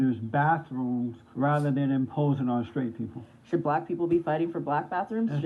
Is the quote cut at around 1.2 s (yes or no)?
yes